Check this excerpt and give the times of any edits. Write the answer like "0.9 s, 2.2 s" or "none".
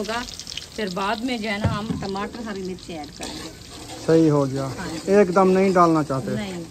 none